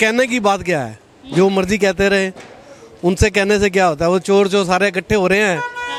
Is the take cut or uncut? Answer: uncut